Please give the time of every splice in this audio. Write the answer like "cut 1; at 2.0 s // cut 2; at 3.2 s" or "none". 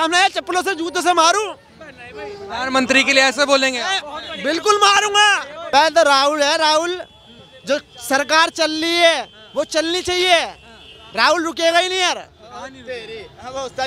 cut 1; at 5.5 s